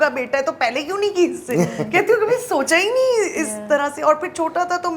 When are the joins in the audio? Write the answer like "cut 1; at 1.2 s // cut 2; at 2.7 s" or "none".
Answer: none